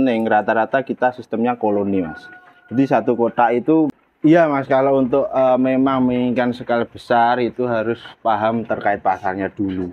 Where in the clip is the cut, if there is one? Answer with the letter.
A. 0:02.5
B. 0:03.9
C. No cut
B